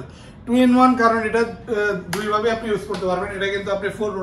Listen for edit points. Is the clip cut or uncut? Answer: uncut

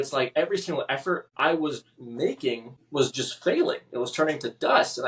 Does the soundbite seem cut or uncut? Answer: cut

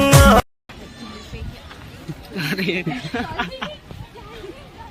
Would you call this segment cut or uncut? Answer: uncut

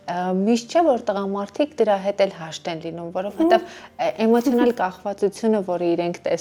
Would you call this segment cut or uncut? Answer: uncut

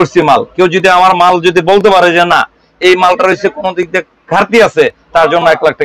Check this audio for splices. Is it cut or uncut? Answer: uncut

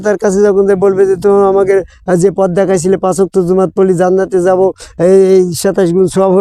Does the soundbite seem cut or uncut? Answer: uncut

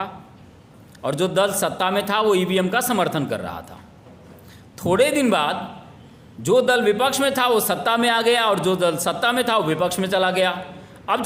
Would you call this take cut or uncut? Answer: uncut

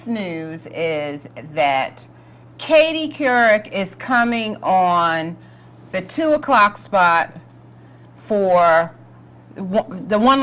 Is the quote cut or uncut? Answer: uncut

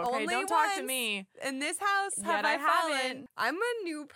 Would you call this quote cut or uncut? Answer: cut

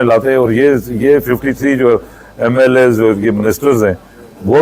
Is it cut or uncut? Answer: uncut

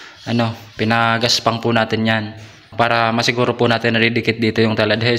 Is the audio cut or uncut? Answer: cut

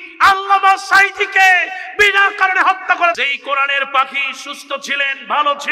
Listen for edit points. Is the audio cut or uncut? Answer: cut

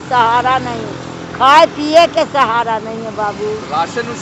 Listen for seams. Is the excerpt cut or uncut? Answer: uncut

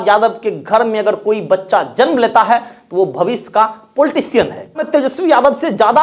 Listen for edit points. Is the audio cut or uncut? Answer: cut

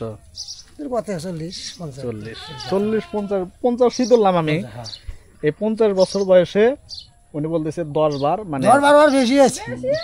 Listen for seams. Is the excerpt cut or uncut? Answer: uncut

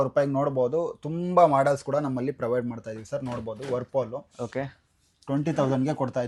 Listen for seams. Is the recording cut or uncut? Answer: uncut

